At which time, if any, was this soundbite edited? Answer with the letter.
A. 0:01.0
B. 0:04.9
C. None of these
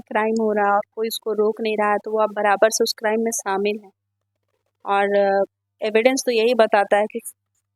C